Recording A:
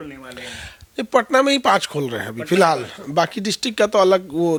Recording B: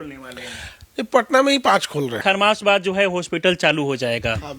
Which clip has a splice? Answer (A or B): B